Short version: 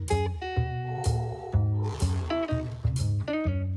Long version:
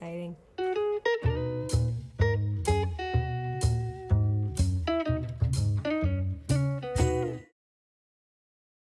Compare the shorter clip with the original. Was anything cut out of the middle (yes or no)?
no